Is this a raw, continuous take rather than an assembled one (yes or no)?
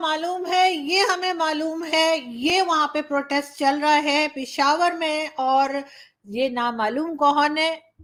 yes